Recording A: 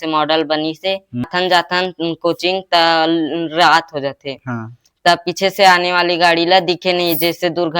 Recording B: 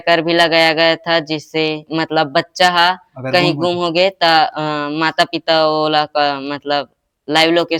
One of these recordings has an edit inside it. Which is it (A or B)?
A